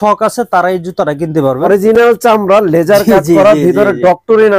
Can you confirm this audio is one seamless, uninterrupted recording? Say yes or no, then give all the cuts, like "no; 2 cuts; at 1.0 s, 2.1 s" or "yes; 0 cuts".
no; 1 cut; at 1.7 s